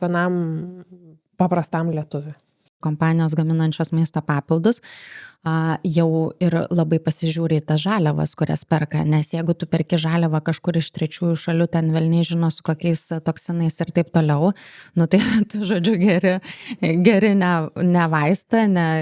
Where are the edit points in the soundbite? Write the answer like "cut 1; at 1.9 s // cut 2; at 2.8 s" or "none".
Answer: cut 1; at 2.7 s